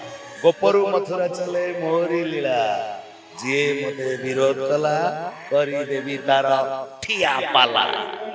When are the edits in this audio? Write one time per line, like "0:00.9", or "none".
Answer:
none